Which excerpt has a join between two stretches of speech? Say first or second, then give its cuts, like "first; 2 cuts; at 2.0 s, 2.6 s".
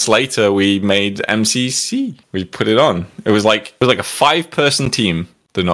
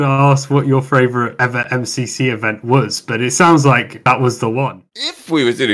second; 1 cut; at 4.8 s